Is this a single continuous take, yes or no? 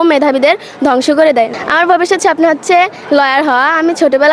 no